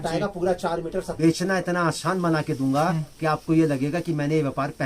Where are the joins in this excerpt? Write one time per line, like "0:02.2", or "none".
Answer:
0:01.1